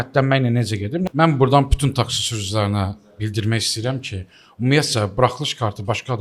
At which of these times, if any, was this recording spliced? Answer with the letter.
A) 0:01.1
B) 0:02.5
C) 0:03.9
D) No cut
A